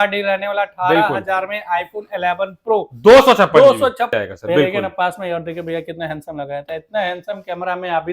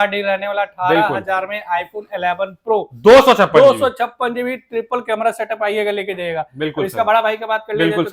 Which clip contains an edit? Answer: first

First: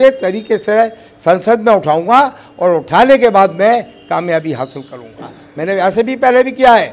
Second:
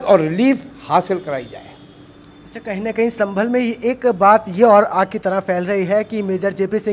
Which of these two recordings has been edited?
second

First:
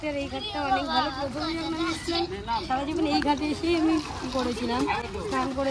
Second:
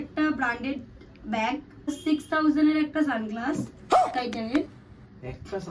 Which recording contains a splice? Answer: second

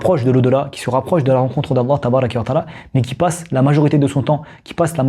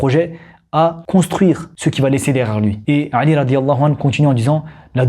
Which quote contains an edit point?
second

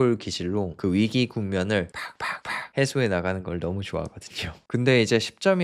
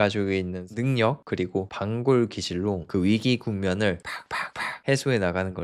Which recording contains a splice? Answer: first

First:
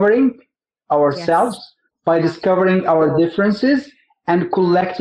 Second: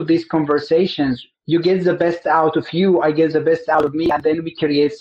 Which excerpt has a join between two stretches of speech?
second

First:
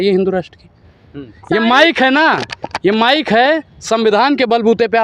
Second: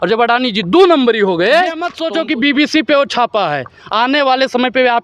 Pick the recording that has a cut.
second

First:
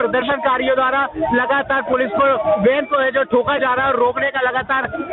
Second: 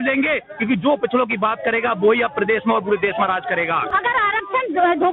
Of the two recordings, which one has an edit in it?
second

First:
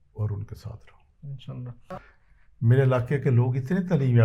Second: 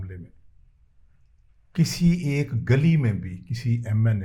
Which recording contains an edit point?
first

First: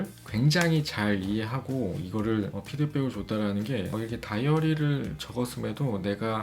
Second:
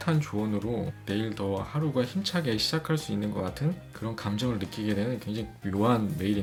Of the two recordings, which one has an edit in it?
first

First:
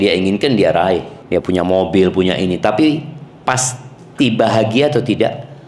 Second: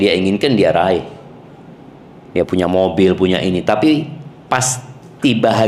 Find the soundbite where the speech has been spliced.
first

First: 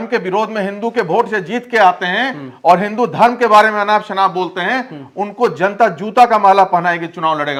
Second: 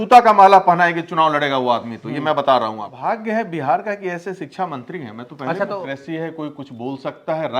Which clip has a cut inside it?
second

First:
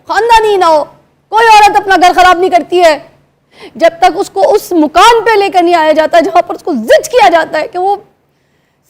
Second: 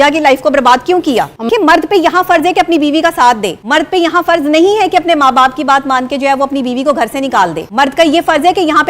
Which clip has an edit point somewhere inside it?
second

